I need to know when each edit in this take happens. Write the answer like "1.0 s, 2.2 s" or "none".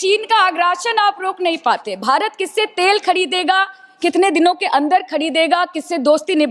none